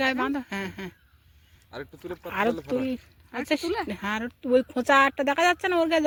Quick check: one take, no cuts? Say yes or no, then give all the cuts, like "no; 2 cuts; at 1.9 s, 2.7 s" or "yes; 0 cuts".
yes; 0 cuts